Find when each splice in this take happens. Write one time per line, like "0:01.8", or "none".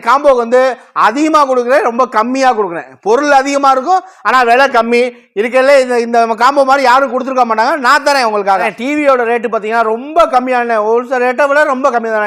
0:08.7